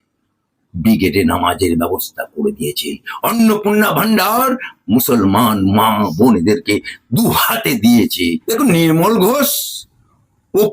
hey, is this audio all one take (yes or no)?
no